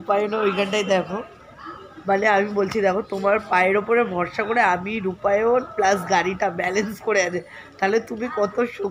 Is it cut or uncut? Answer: uncut